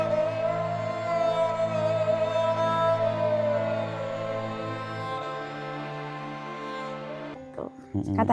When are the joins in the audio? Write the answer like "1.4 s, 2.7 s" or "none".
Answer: 7.2 s